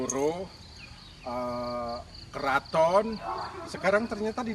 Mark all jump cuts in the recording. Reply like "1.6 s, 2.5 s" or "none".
none